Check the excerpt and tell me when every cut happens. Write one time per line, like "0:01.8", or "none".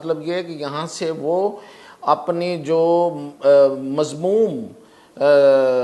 none

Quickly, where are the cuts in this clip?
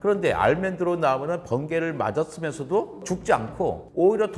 none

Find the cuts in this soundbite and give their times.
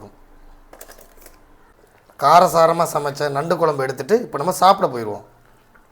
0:01.7

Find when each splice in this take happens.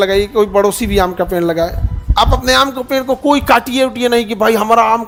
none

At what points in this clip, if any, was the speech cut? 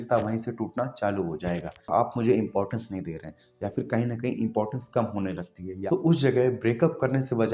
0:01.9
0:05.8

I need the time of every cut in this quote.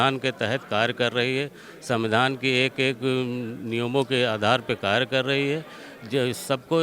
none

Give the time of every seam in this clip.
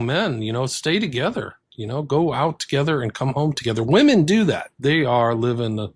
none

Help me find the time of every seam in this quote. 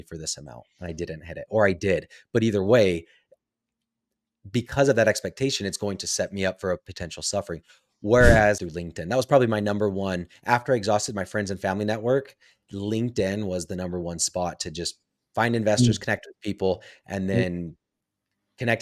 0:08.7

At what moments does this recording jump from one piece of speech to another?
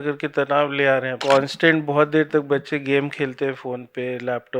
0:01.2

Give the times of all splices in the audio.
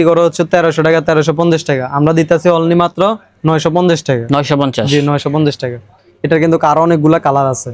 none

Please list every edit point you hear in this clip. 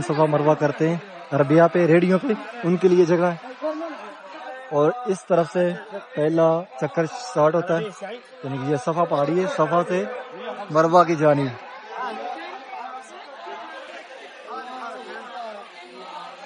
none

